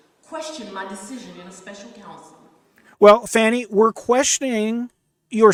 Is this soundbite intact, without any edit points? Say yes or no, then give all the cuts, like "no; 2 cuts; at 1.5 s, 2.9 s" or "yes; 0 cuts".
yes; 0 cuts